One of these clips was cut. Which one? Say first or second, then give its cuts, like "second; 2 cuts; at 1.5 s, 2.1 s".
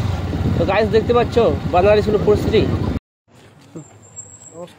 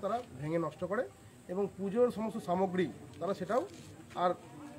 first; 1 cut; at 3.0 s